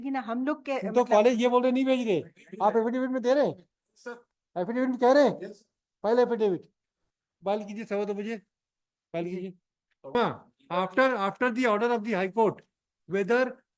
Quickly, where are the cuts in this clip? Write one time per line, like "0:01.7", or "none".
0:10.1